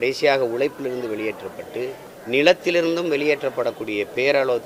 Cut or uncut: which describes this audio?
cut